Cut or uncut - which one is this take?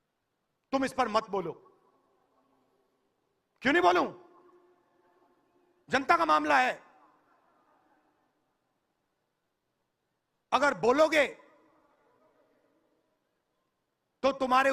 uncut